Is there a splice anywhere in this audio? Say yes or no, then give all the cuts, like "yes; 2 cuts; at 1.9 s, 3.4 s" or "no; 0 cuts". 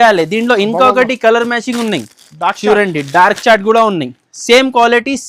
no; 0 cuts